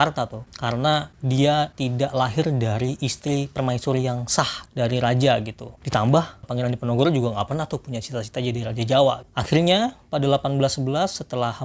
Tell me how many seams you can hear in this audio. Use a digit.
0